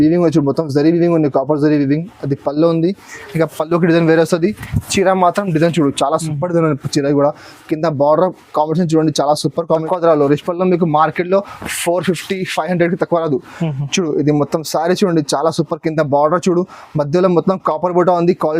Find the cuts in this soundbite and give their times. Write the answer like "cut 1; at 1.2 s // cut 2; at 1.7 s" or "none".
cut 1; at 9.8 s